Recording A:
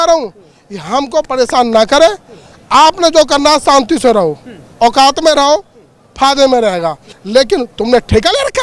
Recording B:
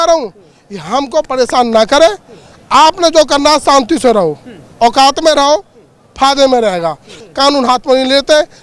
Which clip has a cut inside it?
A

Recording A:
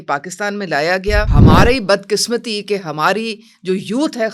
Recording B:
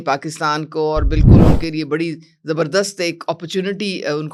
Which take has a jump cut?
A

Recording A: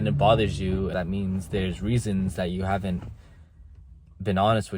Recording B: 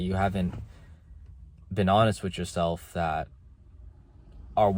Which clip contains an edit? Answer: A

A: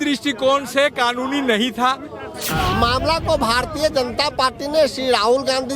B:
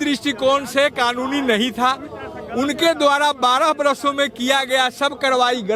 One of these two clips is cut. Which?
A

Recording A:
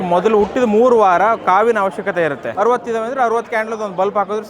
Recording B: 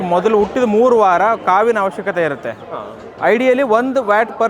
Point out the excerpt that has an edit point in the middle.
A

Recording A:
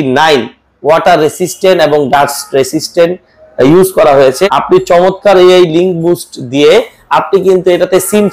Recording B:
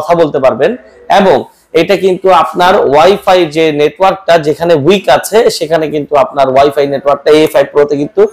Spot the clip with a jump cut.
A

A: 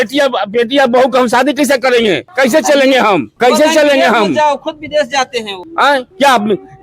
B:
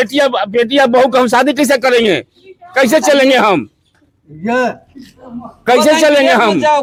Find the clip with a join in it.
A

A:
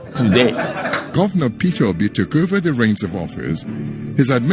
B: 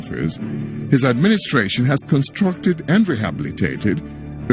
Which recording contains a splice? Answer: A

